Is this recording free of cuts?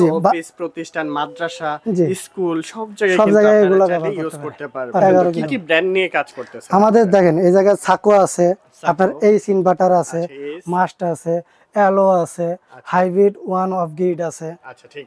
no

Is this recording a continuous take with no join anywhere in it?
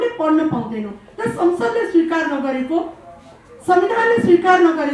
yes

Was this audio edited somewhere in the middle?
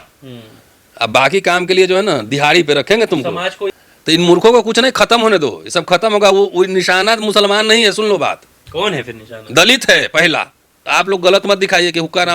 yes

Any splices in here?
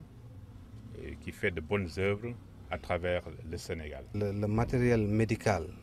yes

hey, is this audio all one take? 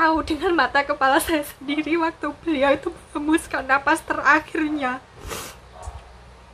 yes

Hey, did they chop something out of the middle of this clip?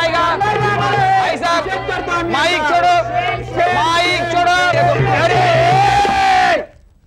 yes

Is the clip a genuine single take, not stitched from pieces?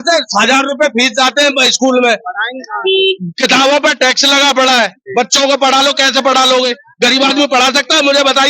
yes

